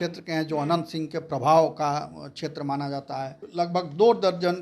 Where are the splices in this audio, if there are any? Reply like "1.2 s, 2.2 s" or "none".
3.4 s